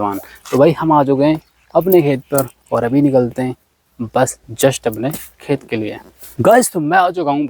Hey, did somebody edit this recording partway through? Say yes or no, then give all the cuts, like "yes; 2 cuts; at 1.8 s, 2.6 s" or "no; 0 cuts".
yes; 1 cut; at 6.2 s